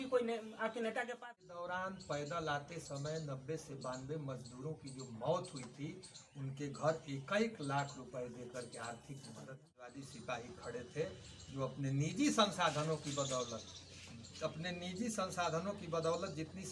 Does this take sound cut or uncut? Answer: cut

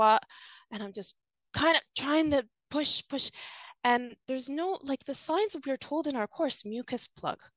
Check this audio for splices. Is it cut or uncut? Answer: uncut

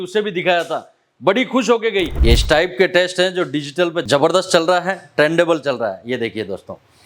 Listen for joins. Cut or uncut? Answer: cut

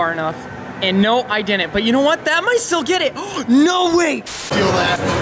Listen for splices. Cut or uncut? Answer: cut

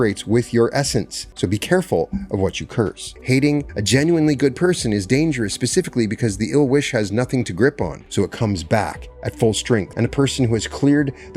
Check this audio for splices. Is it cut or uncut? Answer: cut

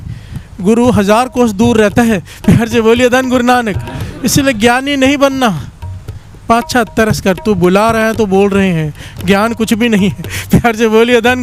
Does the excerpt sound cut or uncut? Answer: uncut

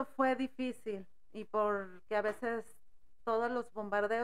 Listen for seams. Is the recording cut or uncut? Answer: uncut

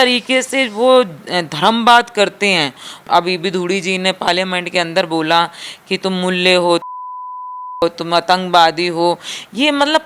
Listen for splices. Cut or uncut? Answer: cut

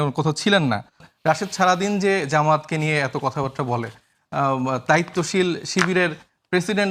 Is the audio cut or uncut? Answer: cut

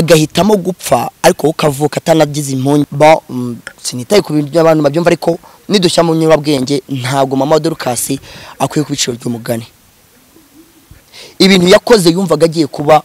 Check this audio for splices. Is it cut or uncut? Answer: cut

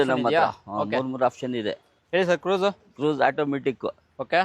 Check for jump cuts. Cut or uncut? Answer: cut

